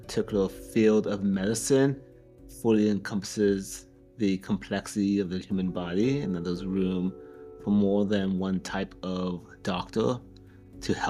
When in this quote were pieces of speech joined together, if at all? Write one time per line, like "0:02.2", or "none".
none